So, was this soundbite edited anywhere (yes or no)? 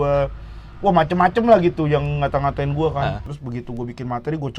yes